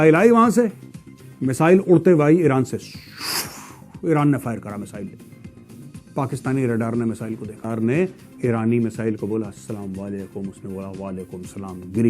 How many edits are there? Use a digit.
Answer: 1